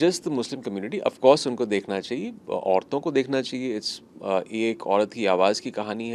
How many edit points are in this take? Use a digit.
0